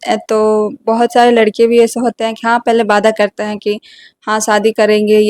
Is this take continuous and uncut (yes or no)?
yes